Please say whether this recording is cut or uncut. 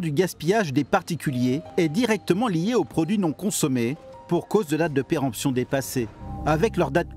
cut